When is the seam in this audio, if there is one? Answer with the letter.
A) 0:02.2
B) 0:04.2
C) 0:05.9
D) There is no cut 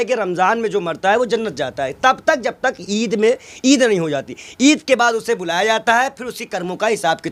D